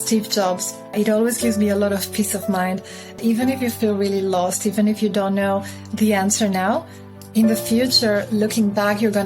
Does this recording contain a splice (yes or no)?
yes